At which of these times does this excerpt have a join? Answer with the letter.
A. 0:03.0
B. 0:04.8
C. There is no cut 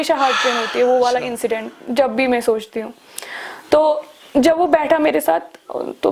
C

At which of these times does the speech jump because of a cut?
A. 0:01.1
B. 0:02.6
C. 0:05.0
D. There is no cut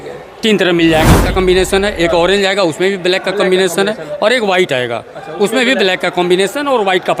A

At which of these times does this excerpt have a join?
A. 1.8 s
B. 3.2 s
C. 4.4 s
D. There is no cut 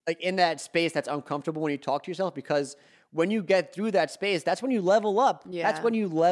D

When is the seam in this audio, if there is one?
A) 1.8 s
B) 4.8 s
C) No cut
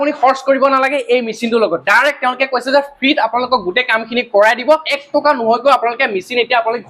B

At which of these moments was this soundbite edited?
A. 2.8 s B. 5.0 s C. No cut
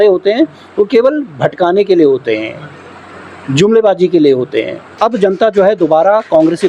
B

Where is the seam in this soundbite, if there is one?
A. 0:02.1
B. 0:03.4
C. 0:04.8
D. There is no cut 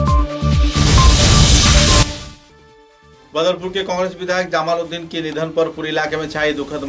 A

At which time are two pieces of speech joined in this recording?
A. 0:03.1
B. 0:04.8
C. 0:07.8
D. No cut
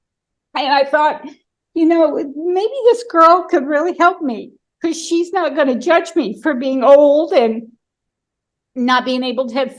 D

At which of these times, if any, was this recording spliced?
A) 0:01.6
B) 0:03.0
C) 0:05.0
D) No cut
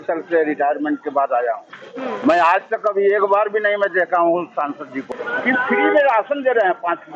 C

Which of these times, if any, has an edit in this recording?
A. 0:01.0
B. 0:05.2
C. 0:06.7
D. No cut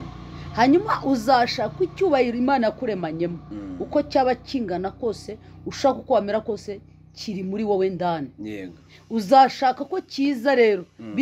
D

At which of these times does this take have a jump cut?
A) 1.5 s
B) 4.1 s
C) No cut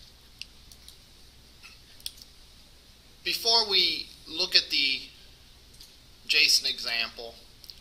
B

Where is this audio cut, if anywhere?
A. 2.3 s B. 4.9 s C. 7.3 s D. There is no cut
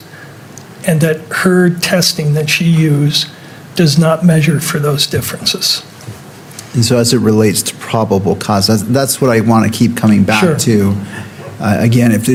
D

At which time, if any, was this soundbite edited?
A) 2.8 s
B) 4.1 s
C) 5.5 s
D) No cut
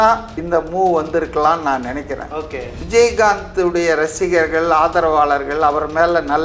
A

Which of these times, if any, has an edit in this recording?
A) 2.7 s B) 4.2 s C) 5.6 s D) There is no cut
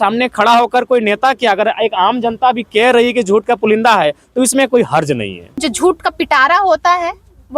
C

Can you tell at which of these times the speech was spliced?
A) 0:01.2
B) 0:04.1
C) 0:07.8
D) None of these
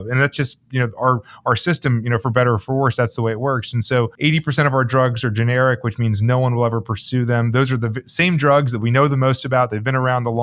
B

